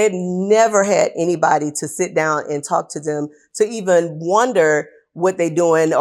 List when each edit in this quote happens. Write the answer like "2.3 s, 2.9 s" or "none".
none